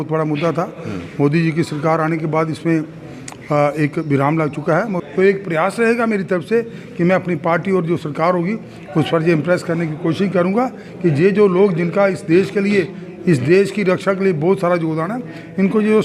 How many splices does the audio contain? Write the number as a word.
one